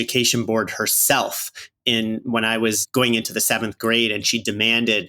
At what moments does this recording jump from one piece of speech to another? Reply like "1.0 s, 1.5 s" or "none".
2.8 s